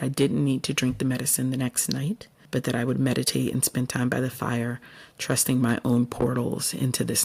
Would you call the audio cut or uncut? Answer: uncut